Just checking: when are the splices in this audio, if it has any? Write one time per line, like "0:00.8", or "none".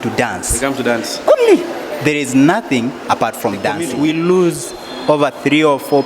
0:03.8